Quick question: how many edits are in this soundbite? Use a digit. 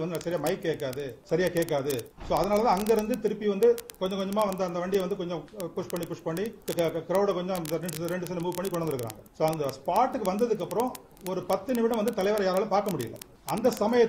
3